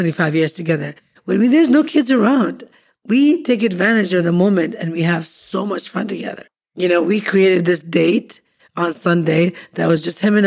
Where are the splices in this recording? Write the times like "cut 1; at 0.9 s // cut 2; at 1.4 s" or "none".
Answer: cut 1; at 6.4 s